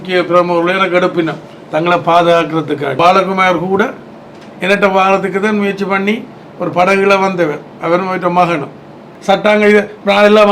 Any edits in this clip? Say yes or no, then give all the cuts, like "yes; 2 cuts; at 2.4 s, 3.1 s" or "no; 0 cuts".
yes; 2 cuts; at 3.0 s, 9.1 s